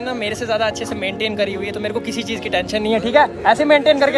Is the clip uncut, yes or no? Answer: yes